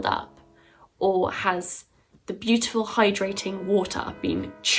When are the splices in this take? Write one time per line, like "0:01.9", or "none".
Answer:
none